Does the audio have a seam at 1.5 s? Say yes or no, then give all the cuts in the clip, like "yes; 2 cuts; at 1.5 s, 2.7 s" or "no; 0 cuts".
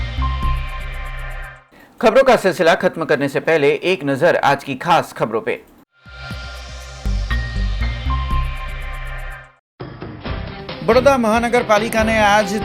no; 0 cuts